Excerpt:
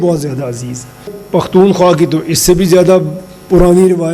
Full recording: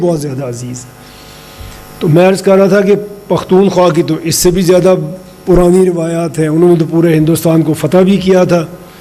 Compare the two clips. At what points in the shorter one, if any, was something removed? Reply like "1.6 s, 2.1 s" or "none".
1.2 s